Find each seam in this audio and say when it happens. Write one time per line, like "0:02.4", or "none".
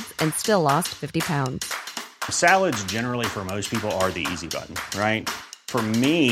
none